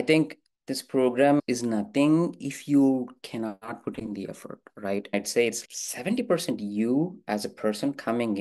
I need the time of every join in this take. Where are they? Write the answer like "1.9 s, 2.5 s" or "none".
5.1 s